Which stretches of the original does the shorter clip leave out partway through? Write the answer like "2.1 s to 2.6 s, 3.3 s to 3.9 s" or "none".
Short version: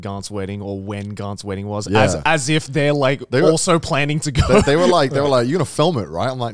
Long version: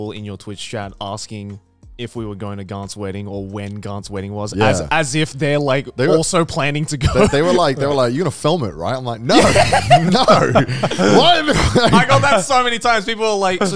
none